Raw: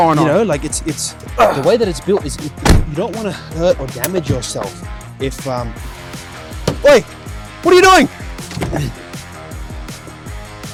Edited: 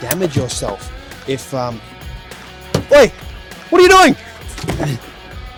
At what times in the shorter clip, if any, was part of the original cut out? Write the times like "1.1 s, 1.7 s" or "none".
none